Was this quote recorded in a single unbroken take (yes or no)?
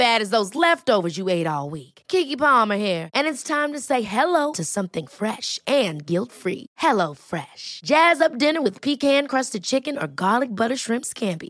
yes